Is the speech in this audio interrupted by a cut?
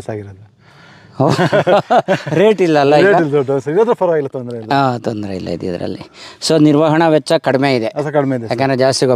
no; 0 cuts

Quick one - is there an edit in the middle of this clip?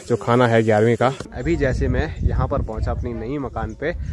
yes; 1 cut; at 1.3 s

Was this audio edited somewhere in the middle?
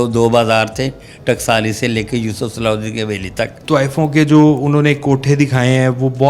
yes; 1 cut; at 3.6 s

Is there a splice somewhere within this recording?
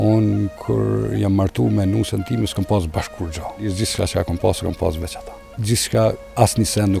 yes; 2 cuts; at 3.7 s, 5.5 s

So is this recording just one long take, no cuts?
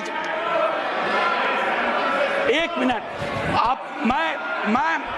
yes; 0 cuts

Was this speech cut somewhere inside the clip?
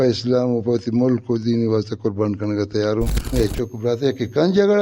yes; 1 cut; at 3.2 s

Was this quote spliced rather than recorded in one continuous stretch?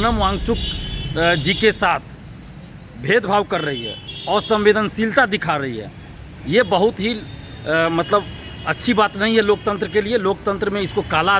no; 0 cuts

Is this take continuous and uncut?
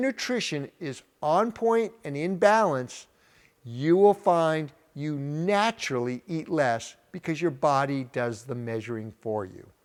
yes; 0 cuts

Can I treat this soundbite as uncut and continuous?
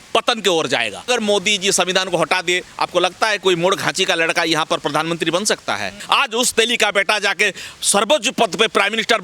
no; 2 cuts; at 1.1 s, 5.9 s

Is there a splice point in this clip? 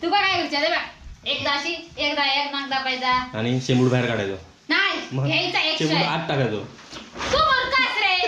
no; 0 cuts

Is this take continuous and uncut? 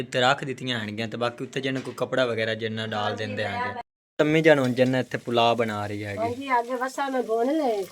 no; 1 cut; at 3.8 s

